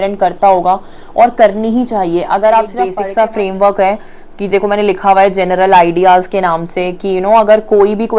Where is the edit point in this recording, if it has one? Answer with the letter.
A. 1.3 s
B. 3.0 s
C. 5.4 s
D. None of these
B